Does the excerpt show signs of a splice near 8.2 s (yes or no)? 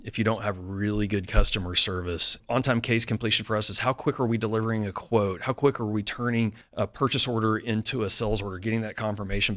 no